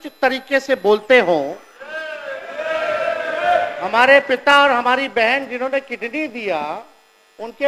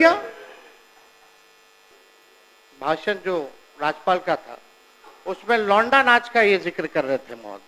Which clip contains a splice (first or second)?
second